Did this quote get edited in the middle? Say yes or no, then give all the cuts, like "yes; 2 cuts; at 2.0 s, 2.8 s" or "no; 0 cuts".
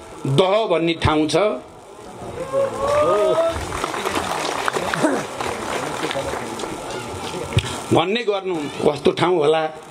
yes; 1 cut; at 8.7 s